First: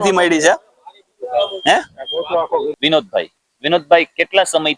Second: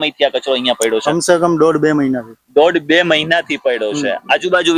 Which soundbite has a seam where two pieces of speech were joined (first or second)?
first